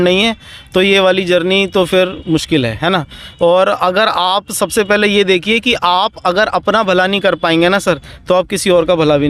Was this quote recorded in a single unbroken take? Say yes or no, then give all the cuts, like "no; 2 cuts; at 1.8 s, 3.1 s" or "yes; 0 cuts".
yes; 0 cuts